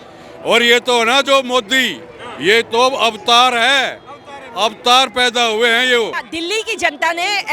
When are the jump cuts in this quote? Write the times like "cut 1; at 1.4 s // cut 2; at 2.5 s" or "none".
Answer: cut 1; at 6.2 s